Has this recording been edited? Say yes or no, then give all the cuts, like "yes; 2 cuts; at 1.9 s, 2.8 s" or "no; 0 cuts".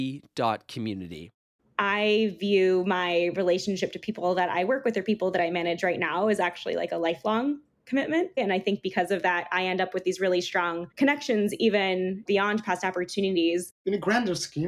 yes; 4 cuts; at 1.6 s, 8.4 s, 12.2 s, 13.7 s